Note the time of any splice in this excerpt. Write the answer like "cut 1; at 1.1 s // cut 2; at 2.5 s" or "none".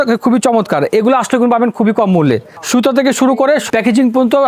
cut 1; at 2.5 s // cut 2; at 3.6 s